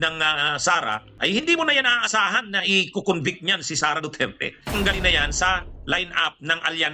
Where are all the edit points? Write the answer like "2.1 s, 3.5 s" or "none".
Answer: 1.1 s, 4.6 s